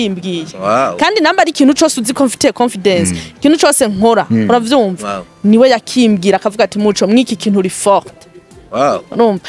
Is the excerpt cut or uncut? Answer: uncut